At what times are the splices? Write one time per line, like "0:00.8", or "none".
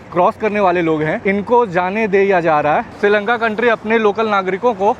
0:01.2
0:02.9